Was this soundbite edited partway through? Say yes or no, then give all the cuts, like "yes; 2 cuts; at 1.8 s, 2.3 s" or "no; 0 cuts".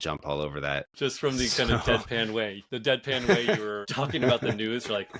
yes; 3 cuts; at 0.9 s, 2.6 s, 3.8 s